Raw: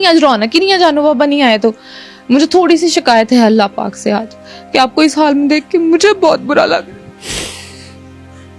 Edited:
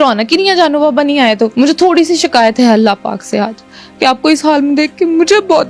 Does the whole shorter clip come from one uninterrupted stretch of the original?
no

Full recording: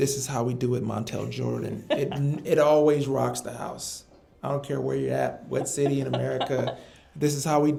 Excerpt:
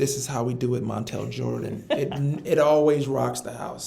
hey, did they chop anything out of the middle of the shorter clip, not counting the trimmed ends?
no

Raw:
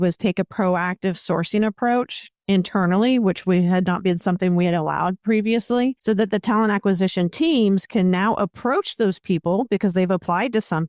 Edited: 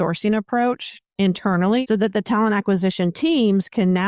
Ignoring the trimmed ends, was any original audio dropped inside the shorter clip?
yes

